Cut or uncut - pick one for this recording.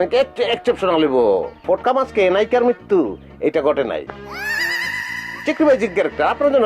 cut